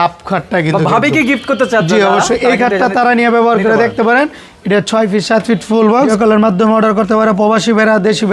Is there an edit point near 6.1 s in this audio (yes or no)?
yes